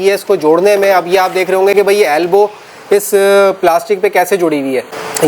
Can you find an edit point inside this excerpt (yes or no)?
no